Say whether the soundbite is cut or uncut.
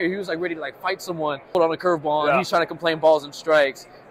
cut